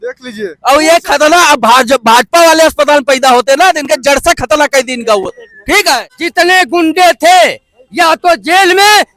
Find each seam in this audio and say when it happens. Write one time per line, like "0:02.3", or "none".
0:06.2